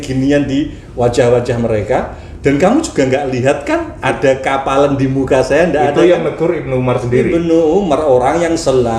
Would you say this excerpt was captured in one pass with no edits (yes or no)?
yes